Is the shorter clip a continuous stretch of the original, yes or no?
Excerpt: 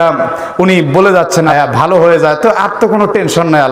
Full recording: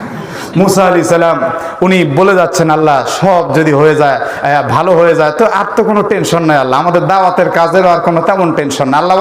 no